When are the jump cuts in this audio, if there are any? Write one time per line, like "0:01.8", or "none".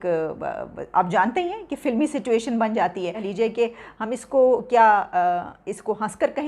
0:03.2